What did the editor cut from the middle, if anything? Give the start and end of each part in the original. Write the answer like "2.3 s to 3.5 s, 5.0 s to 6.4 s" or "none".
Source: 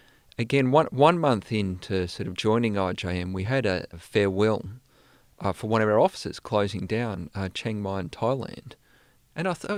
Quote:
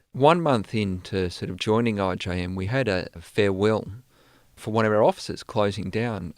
5.4 s to 5.6 s